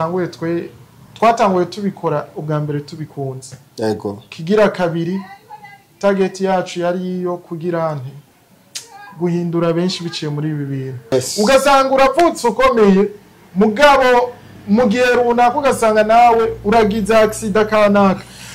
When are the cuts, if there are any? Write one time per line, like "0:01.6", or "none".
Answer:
0:11.1